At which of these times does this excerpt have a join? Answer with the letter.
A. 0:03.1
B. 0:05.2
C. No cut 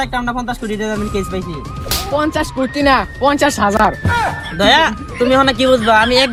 C